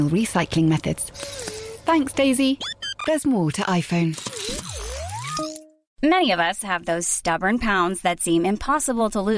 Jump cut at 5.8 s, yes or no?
yes